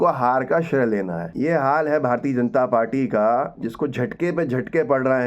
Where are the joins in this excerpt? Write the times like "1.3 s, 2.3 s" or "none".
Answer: 1.2 s